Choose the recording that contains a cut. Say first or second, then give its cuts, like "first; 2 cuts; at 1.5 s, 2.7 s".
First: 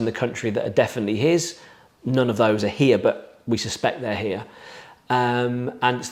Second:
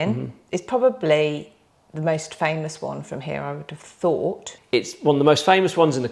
second; 1 cut; at 4.5 s